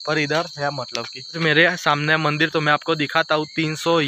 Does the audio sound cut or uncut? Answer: cut